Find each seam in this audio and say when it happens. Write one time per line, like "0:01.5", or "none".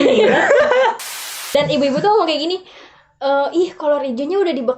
0:01.4